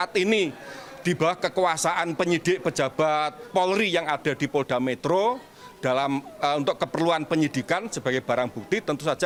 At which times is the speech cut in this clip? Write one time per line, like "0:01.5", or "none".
none